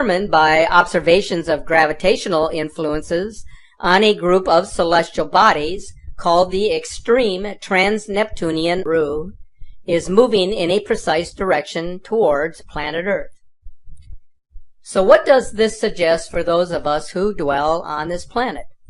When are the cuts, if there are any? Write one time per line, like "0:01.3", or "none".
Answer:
none